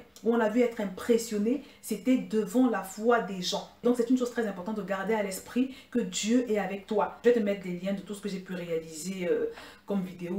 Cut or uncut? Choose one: uncut